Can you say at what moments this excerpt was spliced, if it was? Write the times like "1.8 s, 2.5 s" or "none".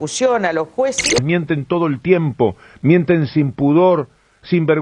1.2 s